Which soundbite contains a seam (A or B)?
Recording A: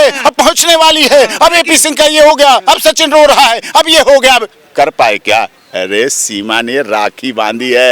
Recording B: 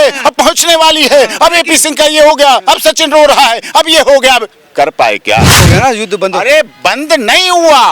B